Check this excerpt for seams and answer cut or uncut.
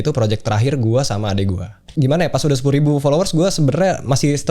cut